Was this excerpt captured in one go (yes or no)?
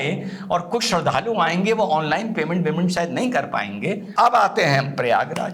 no